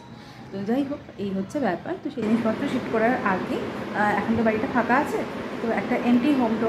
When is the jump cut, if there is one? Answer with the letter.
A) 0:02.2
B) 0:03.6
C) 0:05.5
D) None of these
A